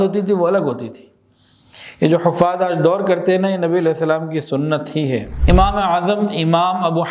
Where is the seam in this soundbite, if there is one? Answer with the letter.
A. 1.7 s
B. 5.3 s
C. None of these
B